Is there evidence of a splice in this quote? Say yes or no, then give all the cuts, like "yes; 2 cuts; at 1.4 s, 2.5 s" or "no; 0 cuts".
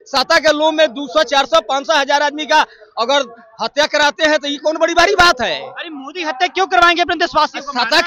no; 0 cuts